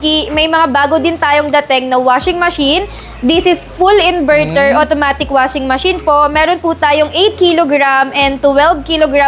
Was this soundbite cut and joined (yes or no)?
no